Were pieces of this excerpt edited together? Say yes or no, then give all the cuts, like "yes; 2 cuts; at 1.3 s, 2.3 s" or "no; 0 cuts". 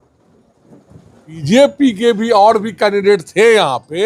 yes; 1 cut; at 1.4 s